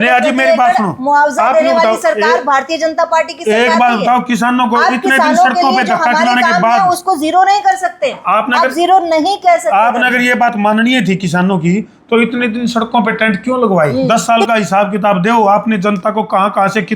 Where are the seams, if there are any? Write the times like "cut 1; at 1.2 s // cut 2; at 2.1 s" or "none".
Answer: cut 1; at 13.9 s